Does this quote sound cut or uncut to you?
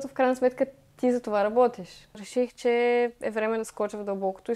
cut